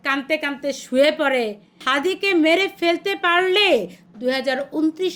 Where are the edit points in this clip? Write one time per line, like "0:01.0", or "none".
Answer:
0:01.8
0:04.0